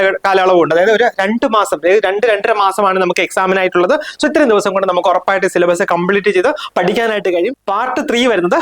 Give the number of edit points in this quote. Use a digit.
1